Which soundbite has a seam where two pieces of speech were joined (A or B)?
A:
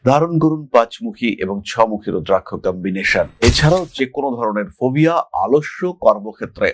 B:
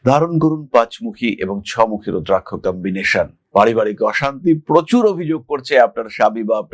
A